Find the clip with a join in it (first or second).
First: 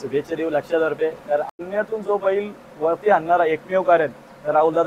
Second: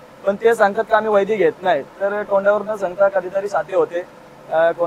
first